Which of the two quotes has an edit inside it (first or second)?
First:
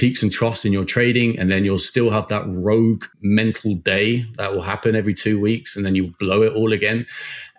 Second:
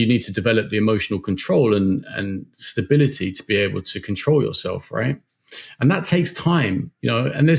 first